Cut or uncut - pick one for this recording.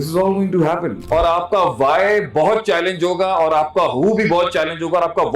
cut